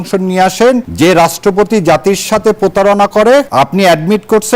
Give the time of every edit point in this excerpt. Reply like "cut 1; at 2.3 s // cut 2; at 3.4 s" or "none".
cut 1; at 0.9 s // cut 2; at 3.5 s